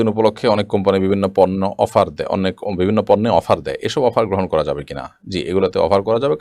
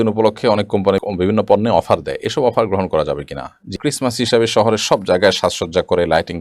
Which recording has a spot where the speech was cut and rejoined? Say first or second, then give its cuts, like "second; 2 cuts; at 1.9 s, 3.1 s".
second; 2 cuts; at 1.0 s, 3.8 s